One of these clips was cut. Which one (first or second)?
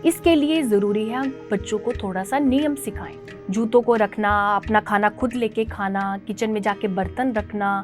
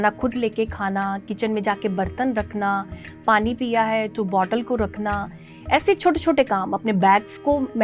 first